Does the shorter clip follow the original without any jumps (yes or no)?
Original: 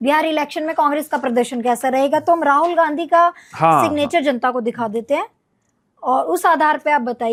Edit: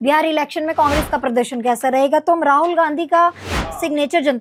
yes